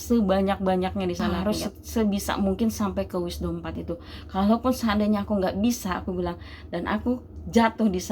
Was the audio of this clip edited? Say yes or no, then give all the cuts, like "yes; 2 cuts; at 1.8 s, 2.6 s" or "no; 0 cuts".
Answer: yes; 1 cut; at 1.3 s